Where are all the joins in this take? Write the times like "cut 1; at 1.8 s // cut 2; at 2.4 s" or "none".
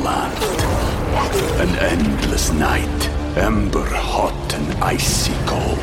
none